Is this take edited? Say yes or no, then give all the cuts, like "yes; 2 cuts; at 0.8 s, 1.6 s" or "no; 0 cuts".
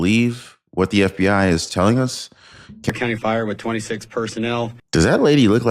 yes; 2 cuts; at 2.9 s, 4.8 s